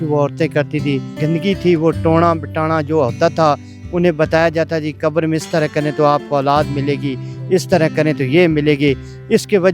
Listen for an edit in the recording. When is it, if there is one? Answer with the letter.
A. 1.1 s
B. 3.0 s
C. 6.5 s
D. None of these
A